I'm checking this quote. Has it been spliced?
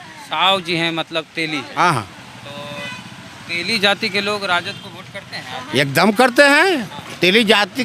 no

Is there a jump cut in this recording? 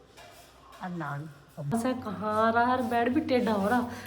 yes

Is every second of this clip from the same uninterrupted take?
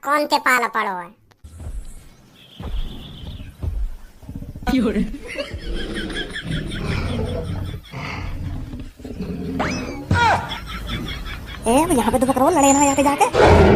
yes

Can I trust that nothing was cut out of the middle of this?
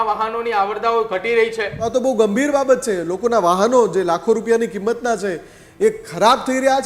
no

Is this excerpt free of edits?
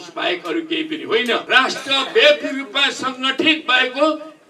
no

